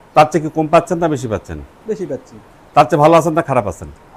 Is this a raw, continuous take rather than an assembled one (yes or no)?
yes